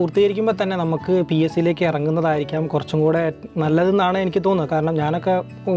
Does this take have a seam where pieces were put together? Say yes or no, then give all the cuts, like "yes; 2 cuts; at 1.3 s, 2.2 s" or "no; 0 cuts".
no; 0 cuts